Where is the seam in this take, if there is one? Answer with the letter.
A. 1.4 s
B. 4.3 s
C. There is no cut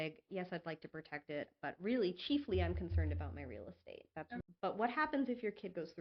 B